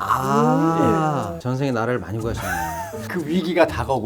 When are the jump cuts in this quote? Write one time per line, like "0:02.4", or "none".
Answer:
0:03.0